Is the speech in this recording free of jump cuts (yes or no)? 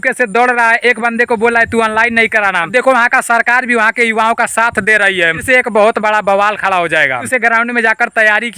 no